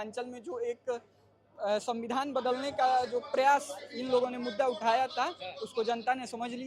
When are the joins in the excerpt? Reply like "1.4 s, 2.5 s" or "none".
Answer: none